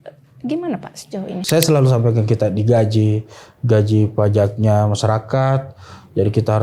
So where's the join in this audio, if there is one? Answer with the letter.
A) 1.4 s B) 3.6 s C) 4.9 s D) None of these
A